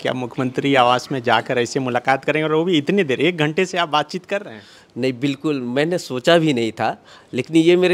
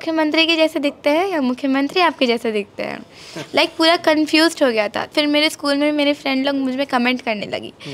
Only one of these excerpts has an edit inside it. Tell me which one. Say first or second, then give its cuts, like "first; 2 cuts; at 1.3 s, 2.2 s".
second; 1 cut; at 5.1 s